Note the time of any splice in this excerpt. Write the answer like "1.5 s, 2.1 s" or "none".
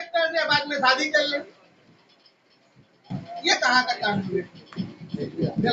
none